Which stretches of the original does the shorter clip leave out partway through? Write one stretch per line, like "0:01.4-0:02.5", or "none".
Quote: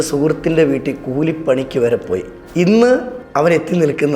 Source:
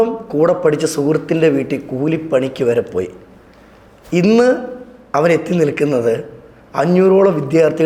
0:03.2-0:03.9
0:04.7-0:05.0